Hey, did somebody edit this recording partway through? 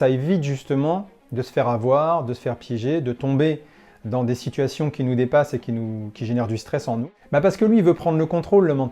yes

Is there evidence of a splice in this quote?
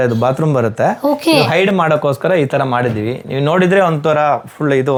no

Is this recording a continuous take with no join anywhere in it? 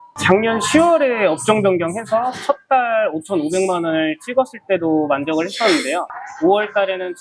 no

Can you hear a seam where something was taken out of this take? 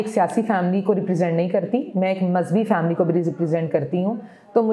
no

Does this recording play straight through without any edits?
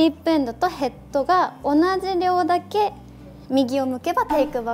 yes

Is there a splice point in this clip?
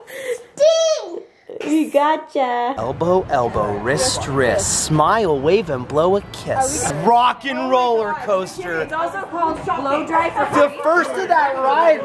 yes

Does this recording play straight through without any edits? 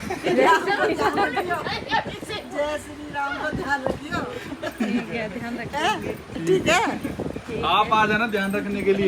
yes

